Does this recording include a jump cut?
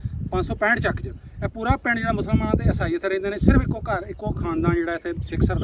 no; 0 cuts

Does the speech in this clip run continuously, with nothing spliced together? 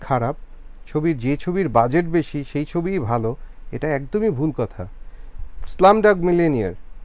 yes; 0 cuts

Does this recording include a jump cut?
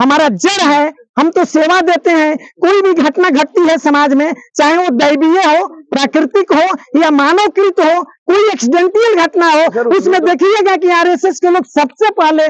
no; 0 cuts

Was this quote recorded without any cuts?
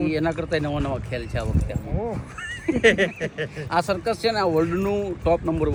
yes; 0 cuts

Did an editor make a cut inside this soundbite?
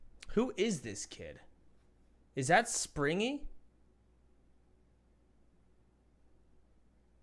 no; 0 cuts

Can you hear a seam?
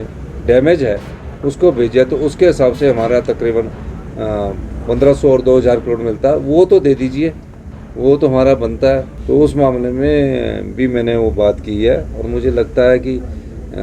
yes; 1 cut; at 9.1 s

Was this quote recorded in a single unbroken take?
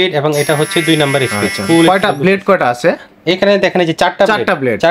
yes; 0 cuts

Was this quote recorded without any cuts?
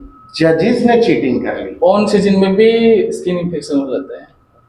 no; 1 cut; at 1.7 s

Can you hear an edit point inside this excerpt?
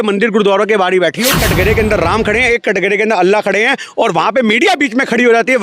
yes; 1 cut; at 1.3 s

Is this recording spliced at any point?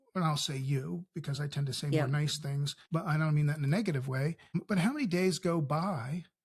yes; 2 cuts; at 2.7 s, 4.6 s

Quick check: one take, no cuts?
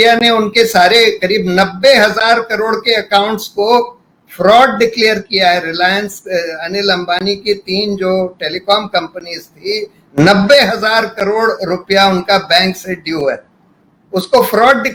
yes; 0 cuts

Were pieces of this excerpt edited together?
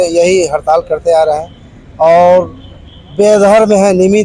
no; 0 cuts

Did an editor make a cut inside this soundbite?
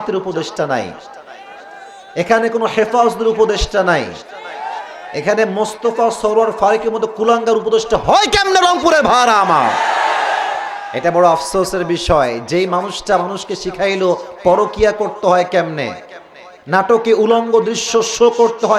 no; 0 cuts

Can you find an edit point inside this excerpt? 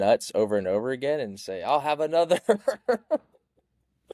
no; 0 cuts

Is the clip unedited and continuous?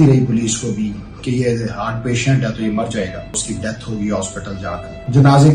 no; 1 cut; at 3.5 s

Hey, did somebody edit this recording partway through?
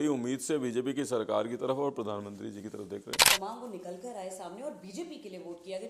yes; 1 cut; at 3.2 s

